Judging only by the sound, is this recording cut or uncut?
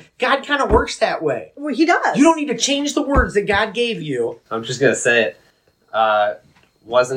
cut